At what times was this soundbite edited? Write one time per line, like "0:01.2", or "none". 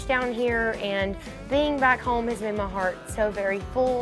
none

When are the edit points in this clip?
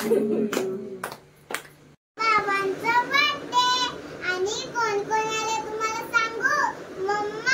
0:02.1

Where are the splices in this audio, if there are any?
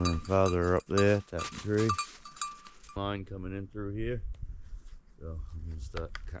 0:02.9

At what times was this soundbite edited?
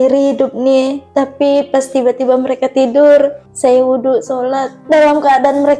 0:01.0
0:03.4
0:04.7

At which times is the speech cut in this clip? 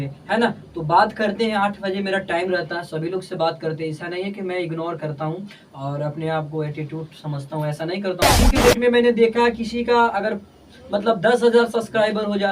0:08.4

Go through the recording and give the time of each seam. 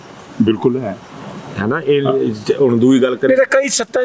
none

